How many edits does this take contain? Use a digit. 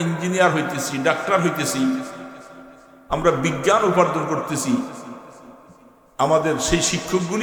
0